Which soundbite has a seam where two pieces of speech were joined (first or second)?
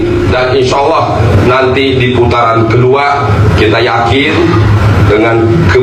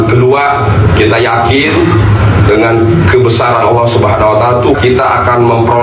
second